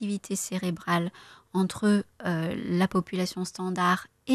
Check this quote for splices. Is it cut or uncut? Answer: uncut